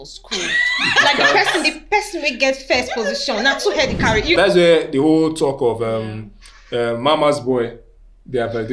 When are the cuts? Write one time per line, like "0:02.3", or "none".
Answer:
0:04.4